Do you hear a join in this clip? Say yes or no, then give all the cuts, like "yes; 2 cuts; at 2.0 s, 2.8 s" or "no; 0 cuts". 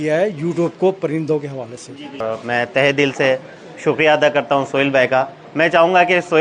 yes; 1 cut; at 2.2 s